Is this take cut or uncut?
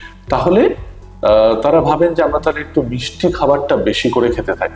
uncut